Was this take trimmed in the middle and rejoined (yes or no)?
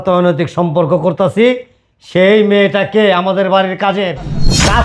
no